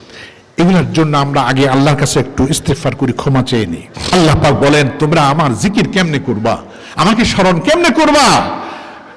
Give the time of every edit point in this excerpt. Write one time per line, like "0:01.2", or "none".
0:04.0

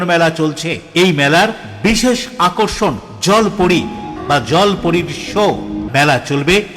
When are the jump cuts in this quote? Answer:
0:04.1
0:05.8

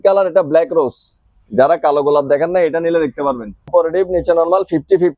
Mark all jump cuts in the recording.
0:03.7

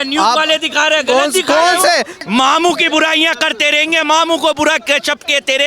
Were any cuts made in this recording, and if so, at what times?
0:02.2

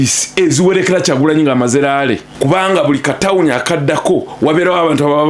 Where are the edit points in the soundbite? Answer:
0:02.3

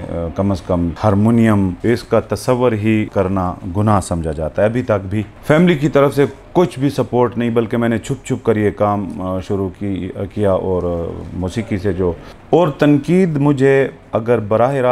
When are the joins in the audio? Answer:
0:00.9
0:01.8
0:03.1
0:05.3
0:12.3

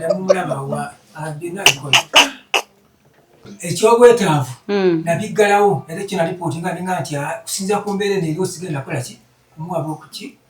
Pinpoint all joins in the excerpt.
0:03.4

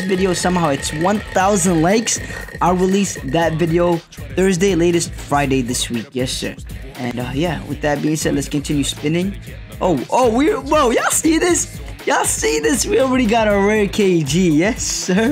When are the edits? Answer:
none

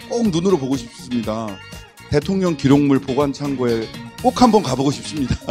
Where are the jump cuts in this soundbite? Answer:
none

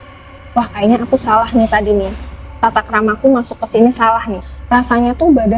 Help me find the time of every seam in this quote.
0:04.4

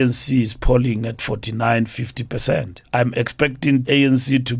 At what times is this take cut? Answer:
0:02.8
0:03.8

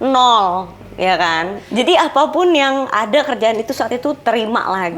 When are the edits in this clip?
0:01.6

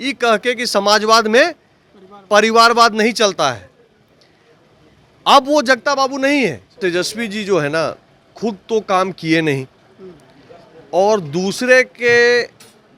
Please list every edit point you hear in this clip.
0:06.7

